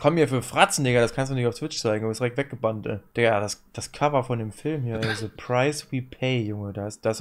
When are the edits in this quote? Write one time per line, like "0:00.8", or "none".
0:03.0